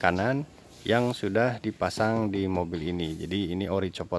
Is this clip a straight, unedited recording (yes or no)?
yes